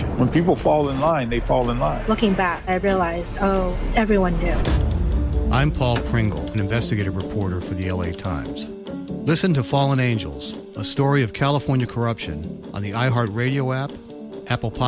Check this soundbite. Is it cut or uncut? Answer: uncut